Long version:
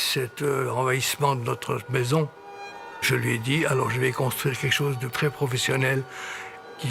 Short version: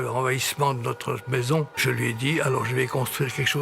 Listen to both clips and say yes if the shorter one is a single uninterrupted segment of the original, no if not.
no